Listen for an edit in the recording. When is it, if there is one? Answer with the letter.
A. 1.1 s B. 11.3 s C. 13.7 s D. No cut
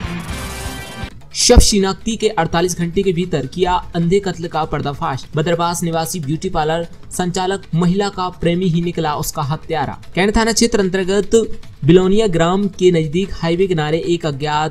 A